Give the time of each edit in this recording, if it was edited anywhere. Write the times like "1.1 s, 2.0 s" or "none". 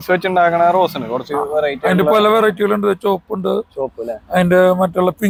none